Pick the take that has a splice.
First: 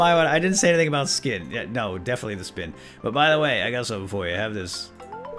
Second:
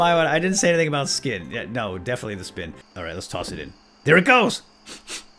second; 1 cut; at 2.8 s

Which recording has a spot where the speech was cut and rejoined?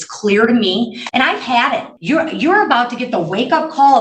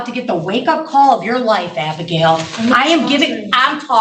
first; 2 cuts; at 1.0 s, 1.9 s

